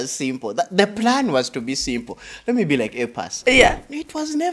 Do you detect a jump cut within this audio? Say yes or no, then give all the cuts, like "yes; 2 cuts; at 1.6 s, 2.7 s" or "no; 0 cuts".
no; 0 cuts